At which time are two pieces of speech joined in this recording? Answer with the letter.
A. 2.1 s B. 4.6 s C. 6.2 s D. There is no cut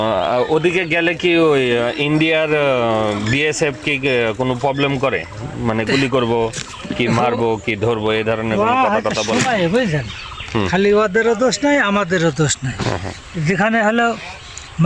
D